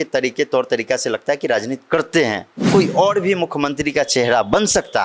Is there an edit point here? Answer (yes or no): yes